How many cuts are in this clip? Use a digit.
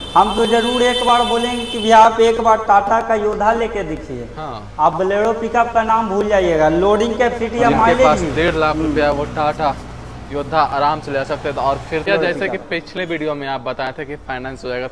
2